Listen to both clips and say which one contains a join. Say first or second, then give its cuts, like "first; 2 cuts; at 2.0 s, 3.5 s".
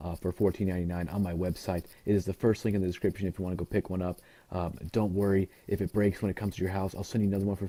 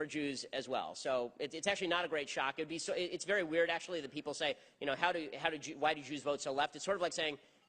second; 1 cut; at 1.1 s